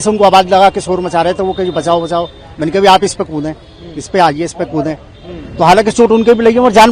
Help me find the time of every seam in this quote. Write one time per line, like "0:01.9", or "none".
none